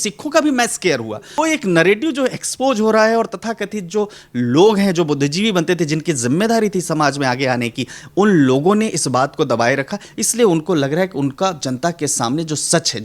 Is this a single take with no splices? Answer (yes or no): no